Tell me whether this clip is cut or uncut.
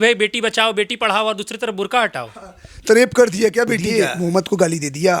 cut